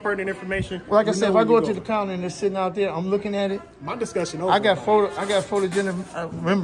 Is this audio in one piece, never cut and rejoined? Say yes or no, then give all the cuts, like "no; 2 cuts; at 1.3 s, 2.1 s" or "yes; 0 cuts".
yes; 0 cuts